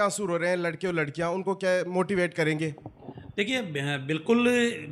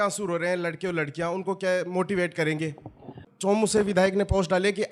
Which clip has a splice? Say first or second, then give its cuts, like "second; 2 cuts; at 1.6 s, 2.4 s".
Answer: second; 1 cut; at 3.3 s